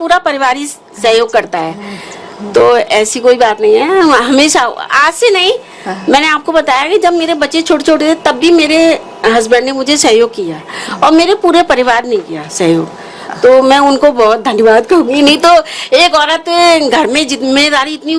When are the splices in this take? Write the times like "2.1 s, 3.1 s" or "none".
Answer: none